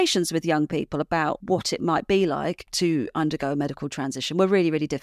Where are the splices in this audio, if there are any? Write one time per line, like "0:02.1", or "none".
0:01.4